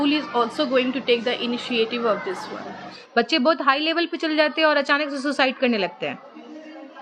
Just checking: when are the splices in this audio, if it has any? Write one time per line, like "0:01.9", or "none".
0:03.0